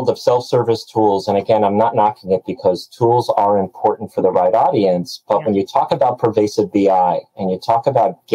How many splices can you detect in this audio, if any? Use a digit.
0